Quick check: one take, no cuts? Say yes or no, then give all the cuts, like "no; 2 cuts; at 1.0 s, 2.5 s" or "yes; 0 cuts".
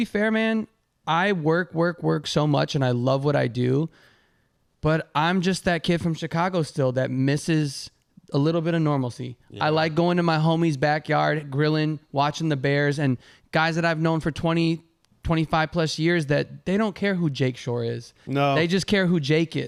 yes; 0 cuts